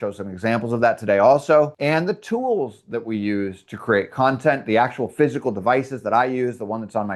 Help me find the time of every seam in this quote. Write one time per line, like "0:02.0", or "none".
none